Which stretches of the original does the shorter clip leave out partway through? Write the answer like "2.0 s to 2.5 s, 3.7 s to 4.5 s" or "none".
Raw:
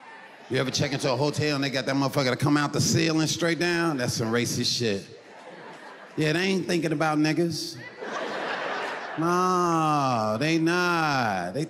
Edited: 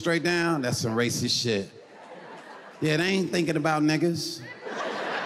none

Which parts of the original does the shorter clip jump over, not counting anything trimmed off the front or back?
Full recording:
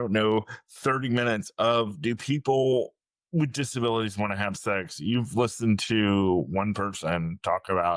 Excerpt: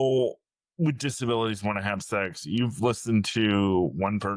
none

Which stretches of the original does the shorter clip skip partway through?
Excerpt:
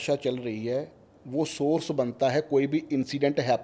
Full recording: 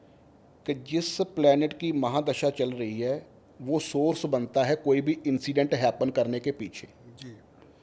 none

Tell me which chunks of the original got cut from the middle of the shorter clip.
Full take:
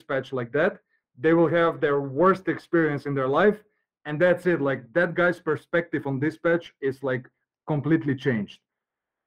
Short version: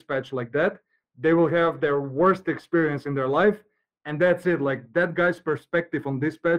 none

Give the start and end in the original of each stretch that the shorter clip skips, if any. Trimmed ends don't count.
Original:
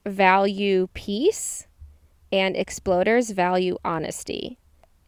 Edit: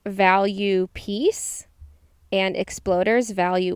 none

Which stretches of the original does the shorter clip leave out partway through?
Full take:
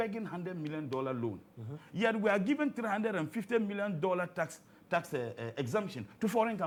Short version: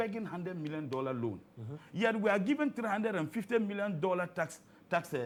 none

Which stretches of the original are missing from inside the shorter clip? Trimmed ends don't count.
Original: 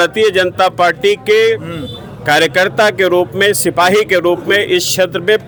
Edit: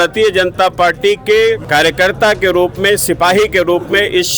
1.6 s to 2.2 s

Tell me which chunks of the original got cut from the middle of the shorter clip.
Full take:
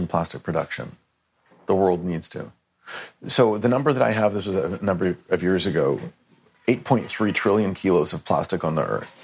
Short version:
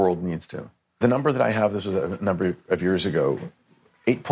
2.8 s to 3.6 s

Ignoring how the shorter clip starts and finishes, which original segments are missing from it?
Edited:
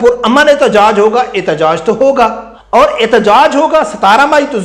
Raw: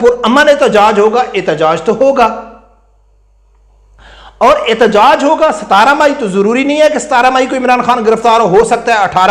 2.5 s to 4.2 s

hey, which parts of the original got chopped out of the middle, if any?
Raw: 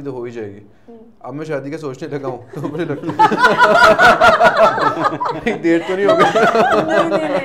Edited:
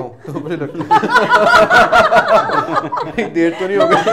none

